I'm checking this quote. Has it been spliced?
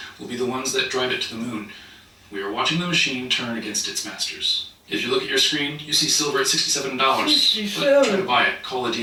no; 0 cuts

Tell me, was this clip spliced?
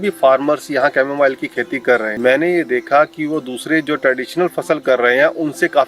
yes; 1 cut; at 2.1 s

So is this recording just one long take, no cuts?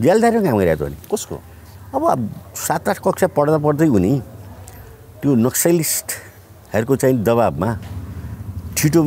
yes; 0 cuts

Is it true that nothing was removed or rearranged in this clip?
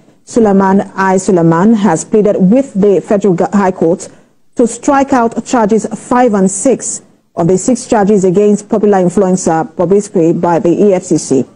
yes; 0 cuts

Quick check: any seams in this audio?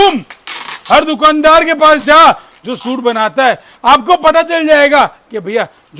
no; 0 cuts

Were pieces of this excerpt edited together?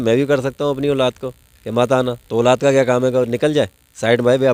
no; 0 cuts

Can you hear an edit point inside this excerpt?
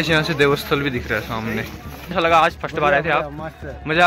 yes; 1 cut; at 2.1 s

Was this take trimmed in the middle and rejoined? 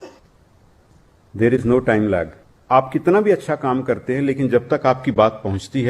yes; 1 cut; at 2.5 s

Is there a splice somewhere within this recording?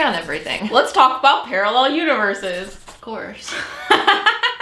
no; 0 cuts

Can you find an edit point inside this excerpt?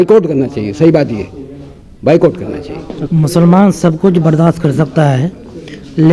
no; 0 cuts

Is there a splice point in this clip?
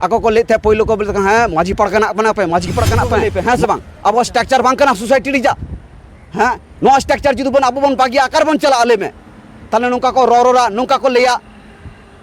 yes; 1 cut; at 3.3 s

